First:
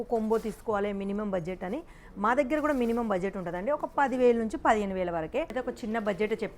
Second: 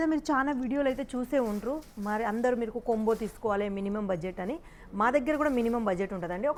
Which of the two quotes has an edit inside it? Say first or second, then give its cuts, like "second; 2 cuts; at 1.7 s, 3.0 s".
first; 1 cut; at 5.5 s